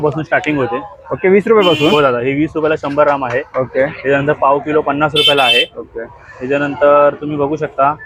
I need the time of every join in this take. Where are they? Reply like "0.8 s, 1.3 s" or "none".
none